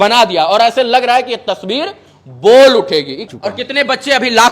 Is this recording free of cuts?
no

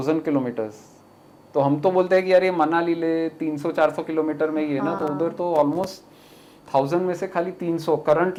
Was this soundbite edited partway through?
no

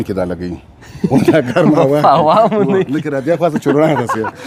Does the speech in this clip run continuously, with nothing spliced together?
yes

